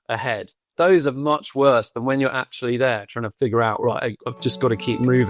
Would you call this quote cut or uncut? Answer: cut